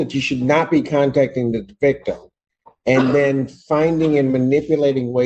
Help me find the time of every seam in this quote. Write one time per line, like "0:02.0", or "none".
none